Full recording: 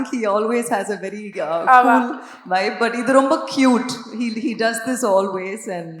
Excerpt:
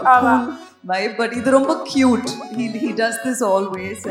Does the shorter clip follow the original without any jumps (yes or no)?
yes